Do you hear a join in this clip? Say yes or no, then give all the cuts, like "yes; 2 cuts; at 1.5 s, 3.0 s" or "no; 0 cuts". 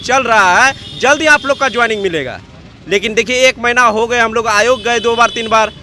no; 0 cuts